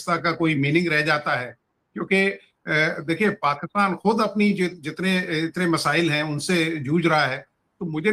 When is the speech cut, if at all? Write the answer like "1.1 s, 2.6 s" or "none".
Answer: none